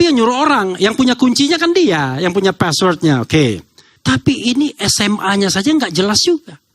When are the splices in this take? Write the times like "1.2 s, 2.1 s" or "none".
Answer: 3.9 s